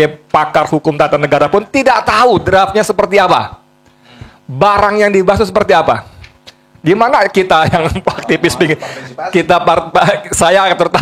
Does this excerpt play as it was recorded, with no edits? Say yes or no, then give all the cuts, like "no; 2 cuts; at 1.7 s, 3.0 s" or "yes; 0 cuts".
yes; 0 cuts